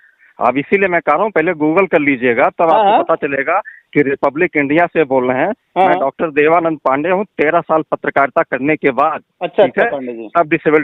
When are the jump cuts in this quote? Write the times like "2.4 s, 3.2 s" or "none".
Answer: none